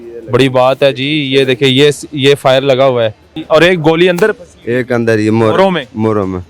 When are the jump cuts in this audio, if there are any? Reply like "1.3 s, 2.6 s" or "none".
3.3 s